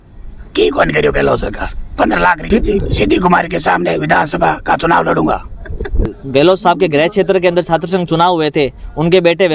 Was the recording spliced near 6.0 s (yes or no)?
yes